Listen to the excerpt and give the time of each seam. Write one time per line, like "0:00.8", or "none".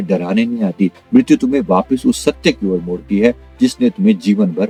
none

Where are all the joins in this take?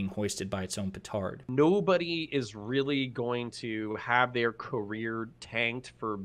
0:01.4

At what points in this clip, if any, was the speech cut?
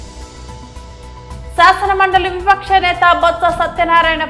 0:01.5

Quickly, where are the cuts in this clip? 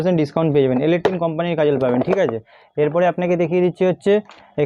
none

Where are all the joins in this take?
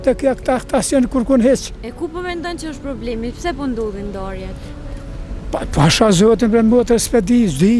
none

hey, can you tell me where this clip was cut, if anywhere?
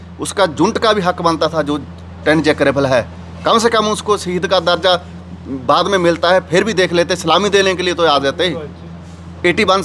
none

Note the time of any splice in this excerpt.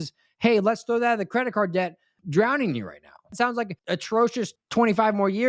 0:02.1
0:03.5
0:04.6

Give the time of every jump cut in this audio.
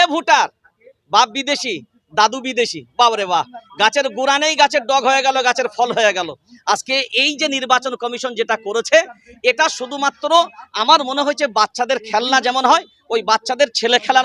none

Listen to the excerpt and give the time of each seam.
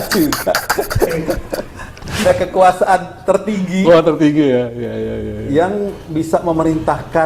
0:02.2

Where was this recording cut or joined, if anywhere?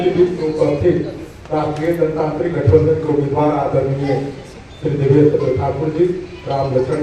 none

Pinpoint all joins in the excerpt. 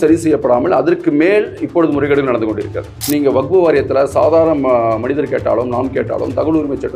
0:02.9

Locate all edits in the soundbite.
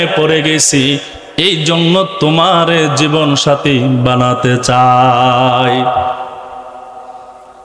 none

